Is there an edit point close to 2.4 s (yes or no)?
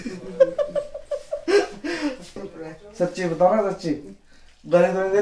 yes